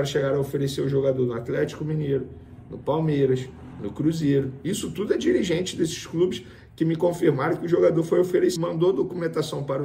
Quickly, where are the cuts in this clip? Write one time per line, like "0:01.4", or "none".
0:08.6